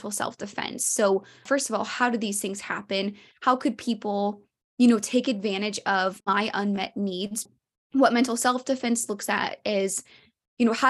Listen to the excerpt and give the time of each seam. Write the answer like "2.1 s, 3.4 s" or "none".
1.4 s, 6.2 s, 7.5 s